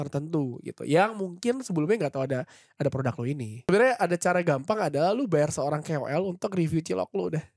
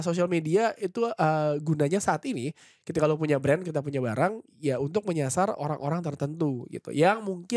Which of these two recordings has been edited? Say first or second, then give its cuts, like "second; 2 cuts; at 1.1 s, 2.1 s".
first; 1 cut; at 3.5 s